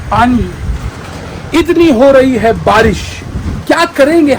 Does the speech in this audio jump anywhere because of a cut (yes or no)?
no